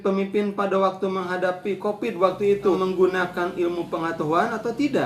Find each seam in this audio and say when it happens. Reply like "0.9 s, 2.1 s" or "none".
2.8 s